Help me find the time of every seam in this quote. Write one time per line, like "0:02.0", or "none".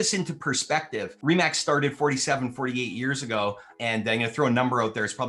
0:01.1
0:03.7